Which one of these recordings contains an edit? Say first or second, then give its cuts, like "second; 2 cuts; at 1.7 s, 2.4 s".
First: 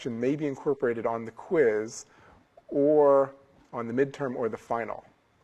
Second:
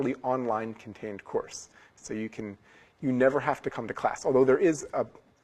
second; 1 cut; at 3.8 s